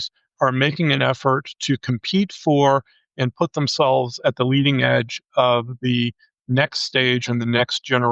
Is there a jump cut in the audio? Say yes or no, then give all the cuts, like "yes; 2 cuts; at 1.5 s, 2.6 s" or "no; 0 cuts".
no; 0 cuts